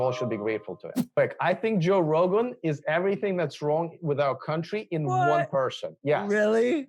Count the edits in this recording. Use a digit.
1